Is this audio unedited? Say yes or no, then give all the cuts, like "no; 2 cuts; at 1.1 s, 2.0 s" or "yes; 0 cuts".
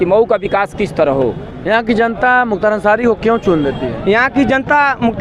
no; 1 cut; at 1.5 s